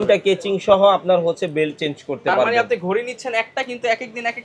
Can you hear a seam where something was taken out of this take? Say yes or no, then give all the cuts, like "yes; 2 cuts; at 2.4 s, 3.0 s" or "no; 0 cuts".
no; 0 cuts